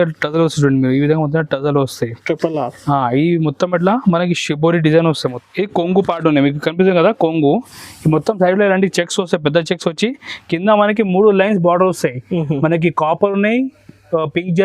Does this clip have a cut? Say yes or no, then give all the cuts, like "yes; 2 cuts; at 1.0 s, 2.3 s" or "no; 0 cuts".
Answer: yes; 1 cut; at 5.3 s